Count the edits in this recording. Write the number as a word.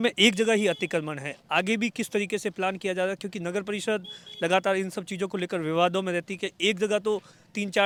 zero